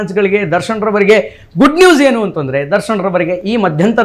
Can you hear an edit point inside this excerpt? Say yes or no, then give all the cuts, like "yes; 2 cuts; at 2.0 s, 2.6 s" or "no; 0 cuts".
no; 0 cuts